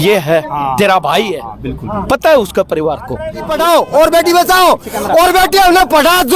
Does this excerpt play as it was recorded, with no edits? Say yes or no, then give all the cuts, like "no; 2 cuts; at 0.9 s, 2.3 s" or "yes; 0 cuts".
no; 1 cut; at 3.4 s